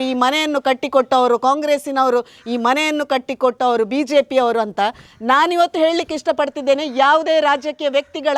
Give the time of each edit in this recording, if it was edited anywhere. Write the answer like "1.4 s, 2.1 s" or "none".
none